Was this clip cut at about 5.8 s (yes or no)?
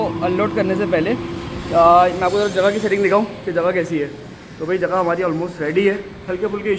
no